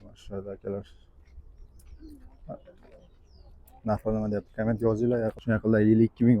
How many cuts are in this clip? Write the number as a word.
one